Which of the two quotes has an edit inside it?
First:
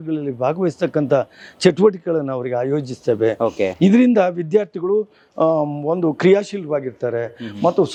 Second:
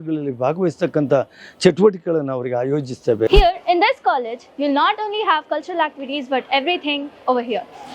second; 1 cut; at 3.3 s

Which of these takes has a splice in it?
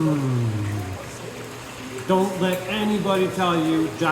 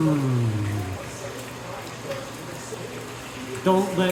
first; 1 cut; at 1.2 s

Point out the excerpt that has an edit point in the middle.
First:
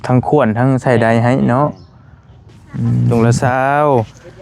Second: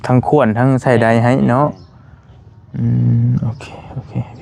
first; 1 cut; at 3.1 s

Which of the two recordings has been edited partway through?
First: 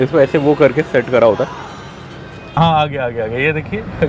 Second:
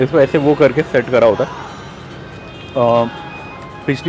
first; 1 cut; at 2.6 s

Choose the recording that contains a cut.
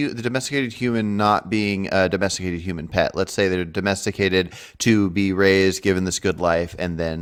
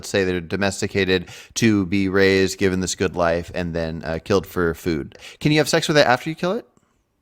second; 1 cut; at 5.3 s

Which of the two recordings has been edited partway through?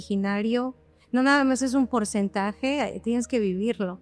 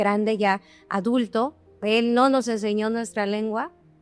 second; 1 cut; at 1.8 s

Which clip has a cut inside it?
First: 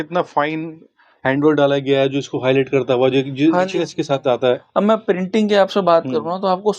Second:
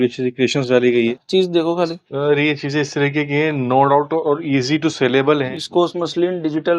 second; 2 cuts; at 1.2 s, 5.5 s

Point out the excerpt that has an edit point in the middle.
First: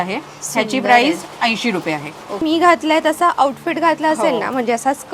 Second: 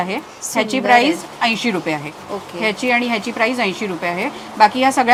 first; 1 cut; at 2.4 s

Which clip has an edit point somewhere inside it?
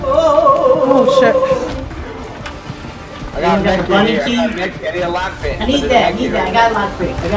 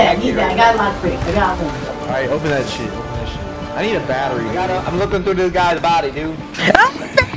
first; 1 cut; at 1.9 s

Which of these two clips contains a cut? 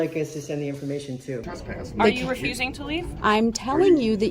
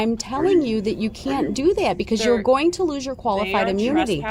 first; 1 cut; at 1.4 s

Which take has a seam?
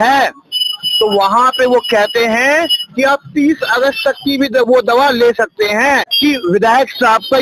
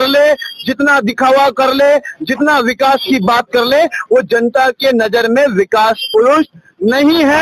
first; 1 cut; at 6.1 s

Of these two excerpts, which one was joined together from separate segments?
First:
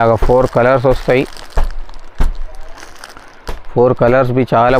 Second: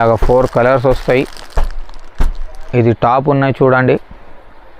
second; 1 cut; at 2.5 s

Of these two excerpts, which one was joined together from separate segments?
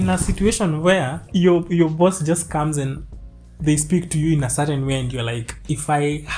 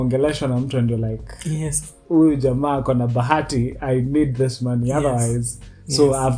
first; 1 cut; at 1.2 s

